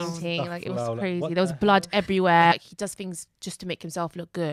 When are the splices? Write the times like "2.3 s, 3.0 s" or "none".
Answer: 2.5 s